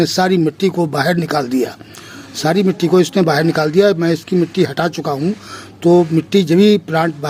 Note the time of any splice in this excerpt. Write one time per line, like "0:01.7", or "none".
none

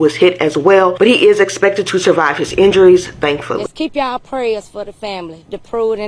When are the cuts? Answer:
0:03.5

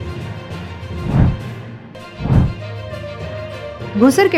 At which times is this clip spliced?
none

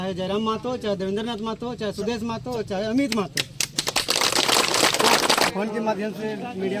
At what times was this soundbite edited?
0:05.5

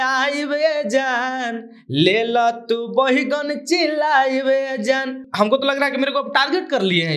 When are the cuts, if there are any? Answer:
0:05.2

